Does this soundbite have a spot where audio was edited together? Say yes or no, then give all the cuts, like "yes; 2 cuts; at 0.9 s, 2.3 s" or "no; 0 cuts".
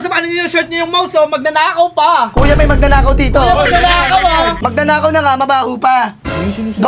yes; 1 cut; at 4.6 s